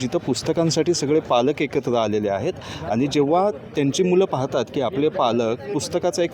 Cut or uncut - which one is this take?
uncut